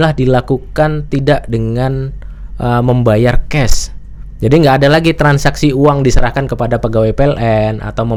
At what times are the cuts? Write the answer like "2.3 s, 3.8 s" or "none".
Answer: none